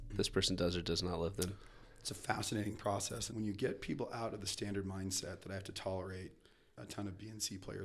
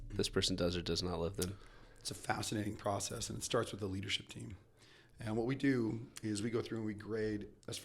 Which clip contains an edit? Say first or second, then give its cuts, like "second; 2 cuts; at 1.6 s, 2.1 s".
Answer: first; 1 cut; at 3.2 s